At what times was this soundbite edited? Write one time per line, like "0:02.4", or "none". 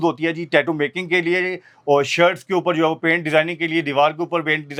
none